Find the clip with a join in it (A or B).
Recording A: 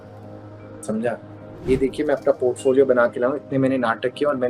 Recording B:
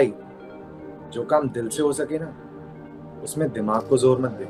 A